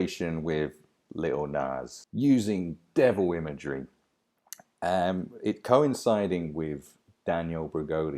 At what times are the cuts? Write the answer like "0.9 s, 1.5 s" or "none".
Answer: 2.0 s